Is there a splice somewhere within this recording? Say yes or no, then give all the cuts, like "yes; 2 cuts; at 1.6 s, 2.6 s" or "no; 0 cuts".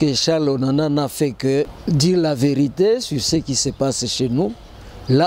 yes; 1 cut; at 1.8 s